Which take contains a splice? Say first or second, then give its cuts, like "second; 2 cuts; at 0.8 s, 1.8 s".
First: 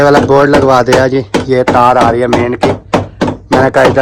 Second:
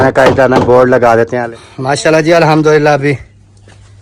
second; 1 cut; at 1.4 s